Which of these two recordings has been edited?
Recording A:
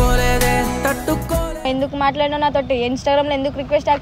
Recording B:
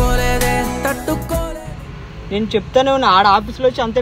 A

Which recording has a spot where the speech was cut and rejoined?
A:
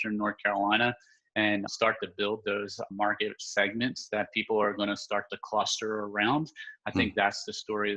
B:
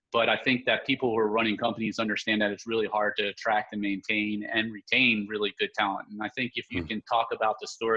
A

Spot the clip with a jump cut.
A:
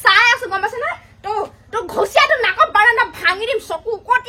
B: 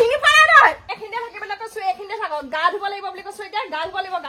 B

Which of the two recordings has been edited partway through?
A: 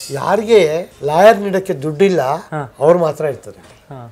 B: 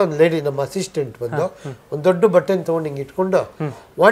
A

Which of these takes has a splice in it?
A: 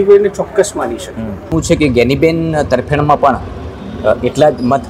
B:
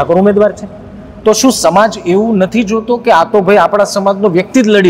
A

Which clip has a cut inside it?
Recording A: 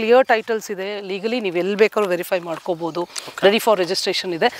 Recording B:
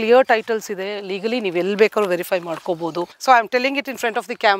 B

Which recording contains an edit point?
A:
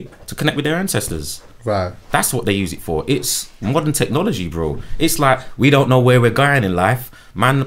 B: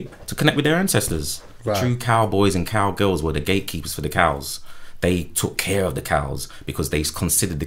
B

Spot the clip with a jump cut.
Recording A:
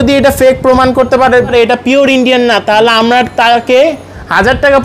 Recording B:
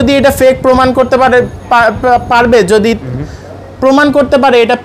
A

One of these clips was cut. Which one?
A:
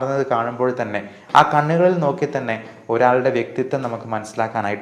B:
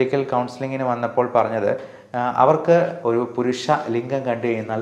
B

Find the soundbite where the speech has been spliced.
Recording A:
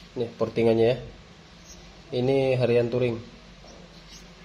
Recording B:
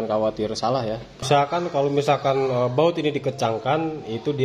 B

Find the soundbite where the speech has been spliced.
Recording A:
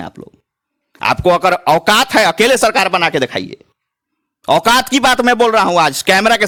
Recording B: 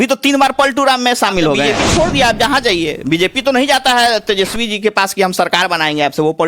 B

